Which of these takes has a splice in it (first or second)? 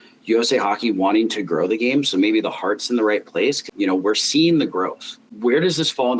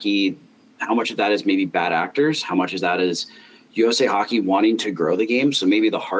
first